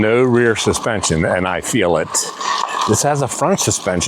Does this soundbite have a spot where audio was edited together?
no; 0 cuts

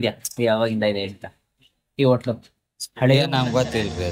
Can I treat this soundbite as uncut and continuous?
yes; 0 cuts

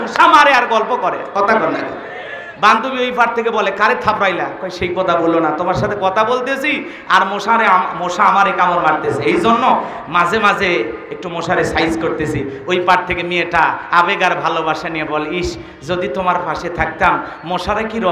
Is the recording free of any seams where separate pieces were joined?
yes; 0 cuts

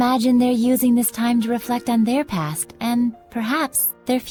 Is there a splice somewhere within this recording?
no; 0 cuts

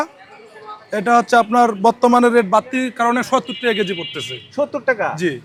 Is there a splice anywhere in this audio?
no; 0 cuts

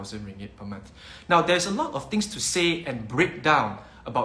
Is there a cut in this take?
no; 0 cuts

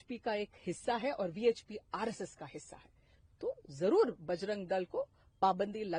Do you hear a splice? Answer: no; 0 cuts

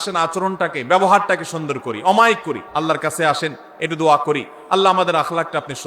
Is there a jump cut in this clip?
yes; 1 cut; at 2.6 s

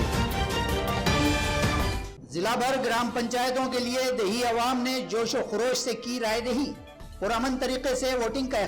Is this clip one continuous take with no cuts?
no; 1 cut; at 2.0 s

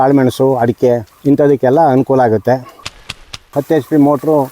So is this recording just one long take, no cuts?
no; 2 cuts; at 1.1 s, 3.2 s

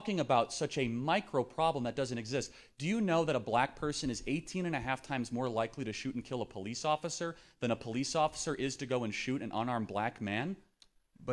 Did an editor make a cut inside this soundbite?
no; 0 cuts

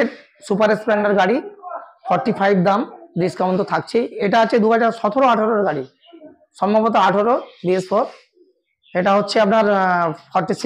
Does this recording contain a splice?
no; 0 cuts

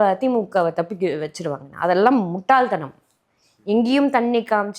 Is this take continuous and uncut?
yes; 0 cuts

